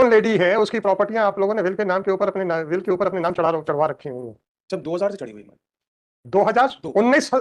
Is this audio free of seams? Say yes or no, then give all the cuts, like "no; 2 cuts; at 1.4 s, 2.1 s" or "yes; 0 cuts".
yes; 0 cuts